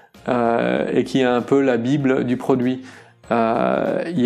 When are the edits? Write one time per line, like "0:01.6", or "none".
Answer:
none